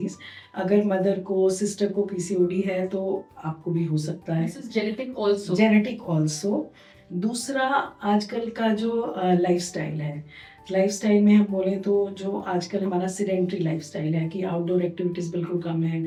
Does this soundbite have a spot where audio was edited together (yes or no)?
no